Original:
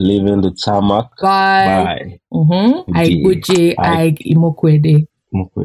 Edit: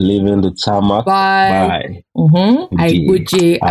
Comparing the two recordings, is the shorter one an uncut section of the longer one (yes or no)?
no